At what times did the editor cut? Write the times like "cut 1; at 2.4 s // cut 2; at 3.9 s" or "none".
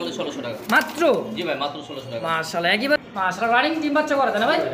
cut 1; at 3.0 s